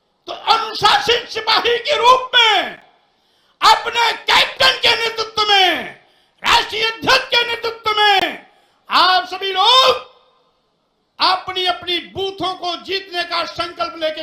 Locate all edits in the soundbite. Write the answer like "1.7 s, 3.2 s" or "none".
none